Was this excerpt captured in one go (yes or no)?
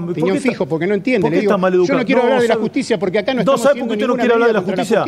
yes